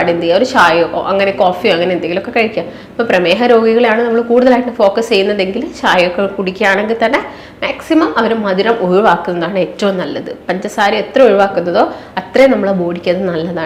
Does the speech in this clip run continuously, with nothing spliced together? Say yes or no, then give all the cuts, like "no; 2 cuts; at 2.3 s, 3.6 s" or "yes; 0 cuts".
yes; 0 cuts